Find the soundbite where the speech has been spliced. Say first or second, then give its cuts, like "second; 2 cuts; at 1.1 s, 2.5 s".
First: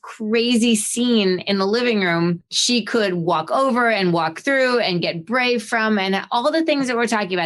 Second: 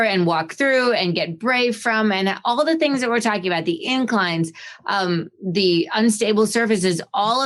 first; 1 cut; at 2.5 s